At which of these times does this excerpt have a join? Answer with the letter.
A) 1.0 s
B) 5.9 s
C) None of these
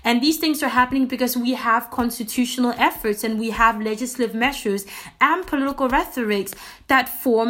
C